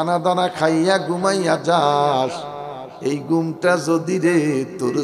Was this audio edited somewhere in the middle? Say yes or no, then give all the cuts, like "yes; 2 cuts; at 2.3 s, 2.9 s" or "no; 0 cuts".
no; 0 cuts